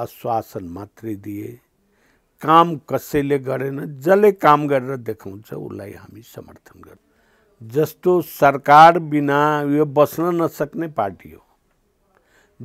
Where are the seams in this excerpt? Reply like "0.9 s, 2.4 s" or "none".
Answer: 7.0 s